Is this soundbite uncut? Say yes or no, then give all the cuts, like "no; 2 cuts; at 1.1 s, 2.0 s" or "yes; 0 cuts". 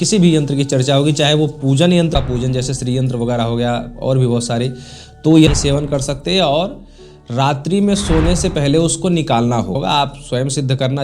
no; 3 cuts; at 2.1 s, 5.5 s, 9.8 s